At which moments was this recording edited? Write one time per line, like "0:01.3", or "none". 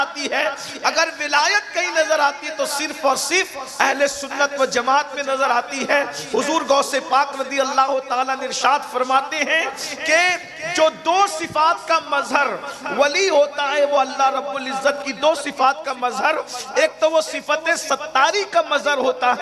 none